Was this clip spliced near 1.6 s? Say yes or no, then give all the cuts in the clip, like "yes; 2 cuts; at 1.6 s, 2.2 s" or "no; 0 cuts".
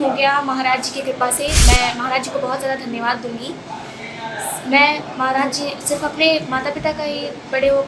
yes; 1 cut; at 1.6 s